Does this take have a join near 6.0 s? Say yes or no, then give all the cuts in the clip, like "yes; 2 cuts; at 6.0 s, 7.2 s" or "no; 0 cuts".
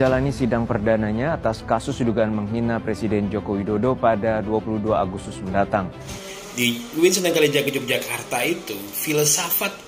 yes; 1 cut; at 6.0 s